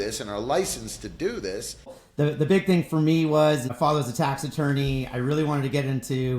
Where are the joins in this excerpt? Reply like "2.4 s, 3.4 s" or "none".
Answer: 2.0 s, 3.7 s